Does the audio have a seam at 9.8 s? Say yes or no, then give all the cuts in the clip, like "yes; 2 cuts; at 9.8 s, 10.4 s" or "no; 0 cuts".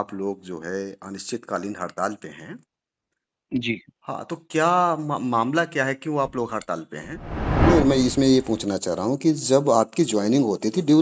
no; 1 cut; at 7.7 s